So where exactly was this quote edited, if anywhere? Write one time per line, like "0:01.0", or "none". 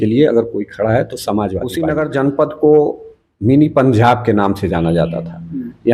0:01.8

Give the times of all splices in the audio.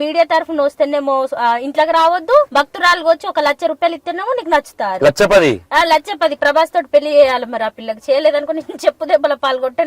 0:02.5

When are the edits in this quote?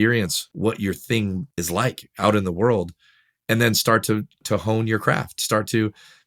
none

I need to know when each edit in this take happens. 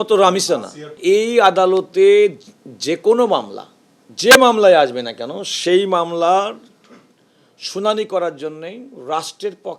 0:00.9

